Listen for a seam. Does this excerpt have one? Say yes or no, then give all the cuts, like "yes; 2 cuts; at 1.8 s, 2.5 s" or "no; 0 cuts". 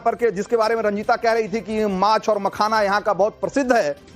yes; 1 cut; at 2.2 s